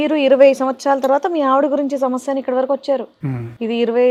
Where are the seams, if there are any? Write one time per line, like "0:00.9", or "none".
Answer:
none